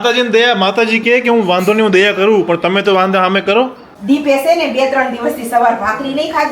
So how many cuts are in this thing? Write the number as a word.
one